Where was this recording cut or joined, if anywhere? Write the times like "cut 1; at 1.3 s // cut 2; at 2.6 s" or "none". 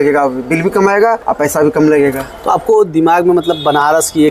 cut 1; at 1.2 s